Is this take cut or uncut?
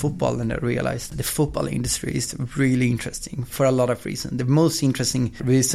cut